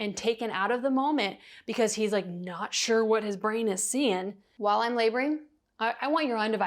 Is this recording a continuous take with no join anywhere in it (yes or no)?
no